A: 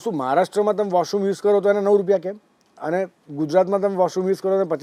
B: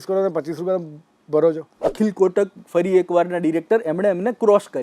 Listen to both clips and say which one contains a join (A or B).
B